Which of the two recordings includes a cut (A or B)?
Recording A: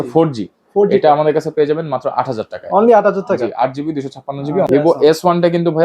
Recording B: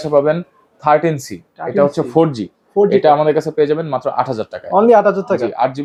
A